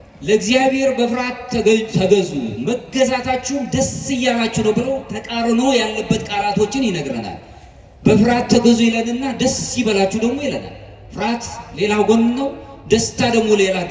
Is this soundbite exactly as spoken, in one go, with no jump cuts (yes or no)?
yes